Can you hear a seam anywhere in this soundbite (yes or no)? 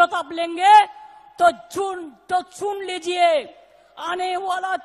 no